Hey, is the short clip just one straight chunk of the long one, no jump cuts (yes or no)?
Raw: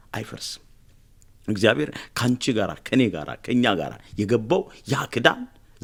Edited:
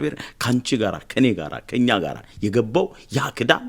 yes